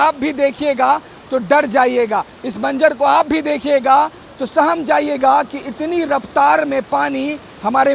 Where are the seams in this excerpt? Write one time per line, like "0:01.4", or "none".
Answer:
none